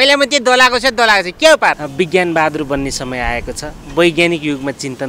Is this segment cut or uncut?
cut